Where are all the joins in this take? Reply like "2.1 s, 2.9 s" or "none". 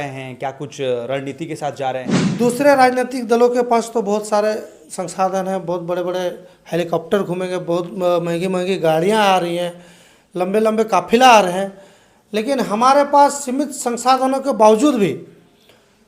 2.2 s

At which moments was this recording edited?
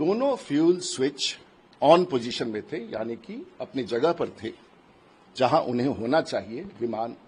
none

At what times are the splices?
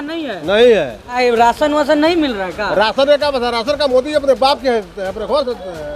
1.2 s

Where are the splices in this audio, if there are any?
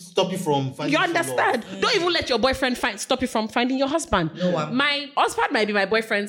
5.0 s

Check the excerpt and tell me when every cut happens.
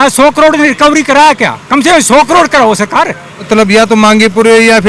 3.5 s

